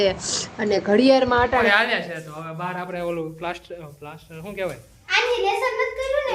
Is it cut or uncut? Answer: cut